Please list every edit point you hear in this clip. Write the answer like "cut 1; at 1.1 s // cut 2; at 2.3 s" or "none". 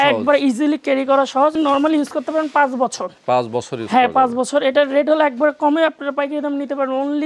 cut 1; at 1.5 s